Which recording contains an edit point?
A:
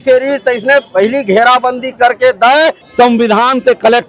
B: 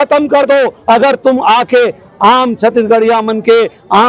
A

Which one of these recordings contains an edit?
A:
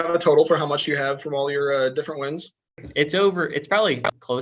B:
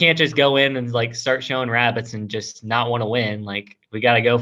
A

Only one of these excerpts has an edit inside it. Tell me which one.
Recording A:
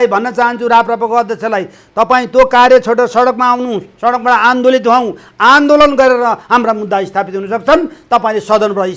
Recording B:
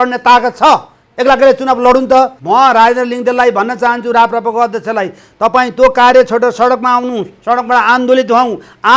B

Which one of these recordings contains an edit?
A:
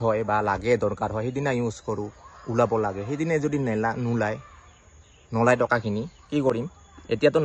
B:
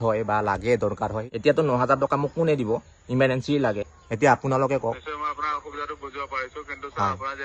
B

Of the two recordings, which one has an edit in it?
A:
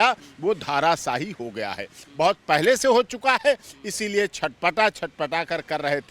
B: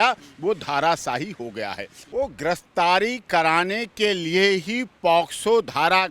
B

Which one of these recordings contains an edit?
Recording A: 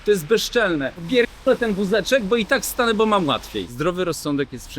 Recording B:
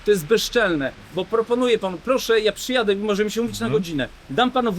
A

